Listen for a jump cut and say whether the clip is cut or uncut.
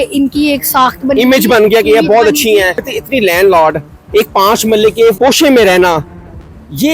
cut